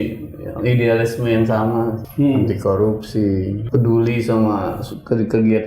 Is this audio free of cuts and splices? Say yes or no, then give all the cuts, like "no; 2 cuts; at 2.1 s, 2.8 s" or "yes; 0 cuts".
no; 2 cuts; at 2.0 s, 3.6 s